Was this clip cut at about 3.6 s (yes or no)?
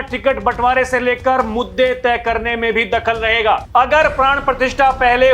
yes